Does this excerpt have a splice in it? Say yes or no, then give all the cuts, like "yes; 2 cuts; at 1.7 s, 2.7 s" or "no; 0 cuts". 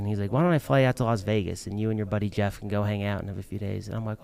no; 0 cuts